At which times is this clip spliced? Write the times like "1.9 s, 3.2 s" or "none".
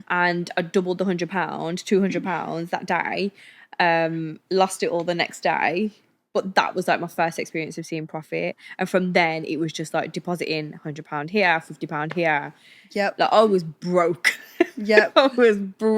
none